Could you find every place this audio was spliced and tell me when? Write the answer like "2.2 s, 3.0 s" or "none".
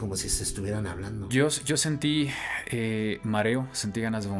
1.3 s